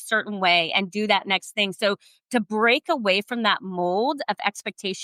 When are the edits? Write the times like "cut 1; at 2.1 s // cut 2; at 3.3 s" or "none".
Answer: none